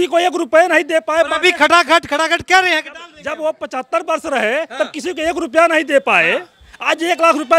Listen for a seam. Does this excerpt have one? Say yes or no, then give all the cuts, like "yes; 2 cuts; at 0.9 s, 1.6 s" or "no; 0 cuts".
no; 0 cuts